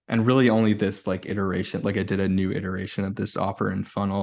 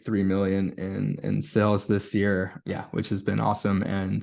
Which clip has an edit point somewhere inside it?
second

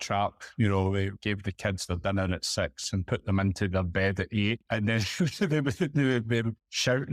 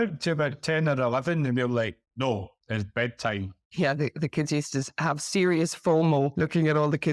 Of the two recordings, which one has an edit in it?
first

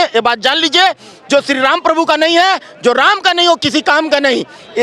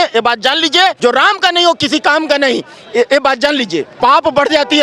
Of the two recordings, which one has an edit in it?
second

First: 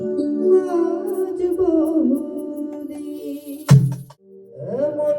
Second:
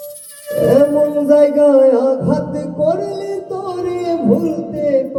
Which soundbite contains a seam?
first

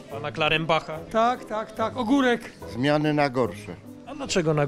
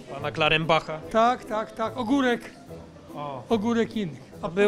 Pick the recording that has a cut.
first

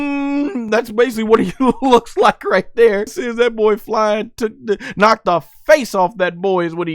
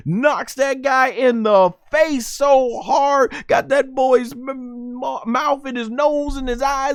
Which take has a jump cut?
first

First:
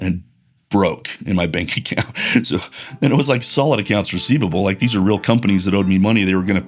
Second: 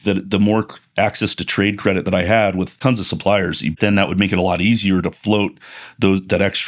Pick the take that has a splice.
second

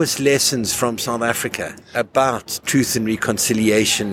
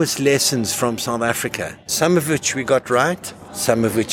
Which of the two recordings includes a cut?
second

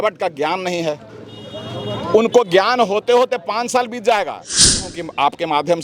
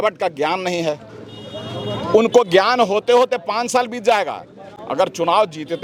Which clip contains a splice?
first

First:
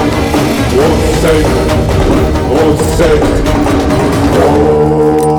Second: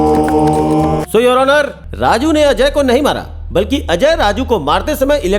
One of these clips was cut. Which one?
second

